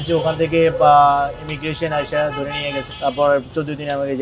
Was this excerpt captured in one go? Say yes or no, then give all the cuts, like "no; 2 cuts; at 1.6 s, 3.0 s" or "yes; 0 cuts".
yes; 0 cuts